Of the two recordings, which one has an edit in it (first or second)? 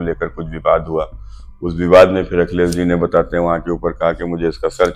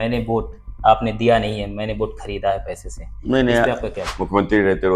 second